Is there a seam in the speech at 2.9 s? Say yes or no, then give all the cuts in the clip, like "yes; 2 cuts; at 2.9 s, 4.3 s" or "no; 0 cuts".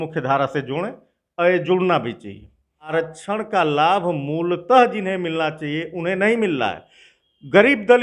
yes; 1 cut; at 2.9 s